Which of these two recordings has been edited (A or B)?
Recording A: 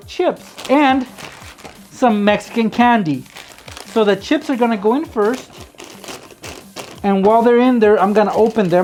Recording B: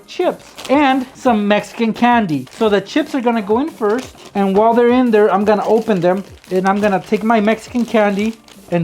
B